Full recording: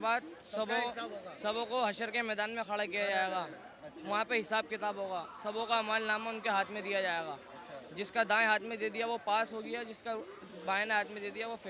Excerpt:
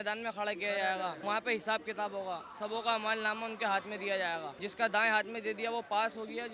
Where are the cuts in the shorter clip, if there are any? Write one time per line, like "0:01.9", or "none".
0:01.2
0:04.6